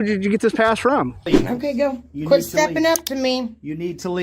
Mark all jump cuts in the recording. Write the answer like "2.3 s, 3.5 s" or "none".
1.2 s